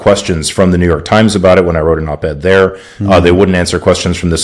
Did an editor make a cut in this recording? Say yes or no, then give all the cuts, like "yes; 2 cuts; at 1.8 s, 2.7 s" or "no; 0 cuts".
no; 0 cuts